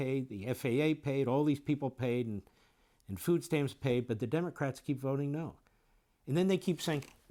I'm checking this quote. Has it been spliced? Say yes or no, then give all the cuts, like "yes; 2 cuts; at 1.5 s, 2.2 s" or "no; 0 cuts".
no; 0 cuts